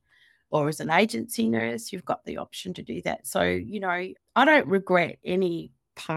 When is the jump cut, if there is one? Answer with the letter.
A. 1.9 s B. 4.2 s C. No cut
B